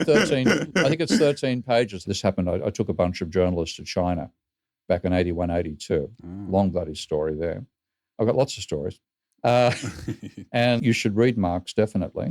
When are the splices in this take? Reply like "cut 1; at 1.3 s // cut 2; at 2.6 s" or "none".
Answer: cut 1; at 2.0 s // cut 2; at 10.8 s